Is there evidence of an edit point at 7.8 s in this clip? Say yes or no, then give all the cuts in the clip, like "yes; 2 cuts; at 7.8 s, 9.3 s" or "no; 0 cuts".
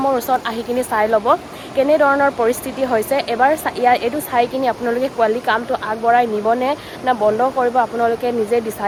no; 0 cuts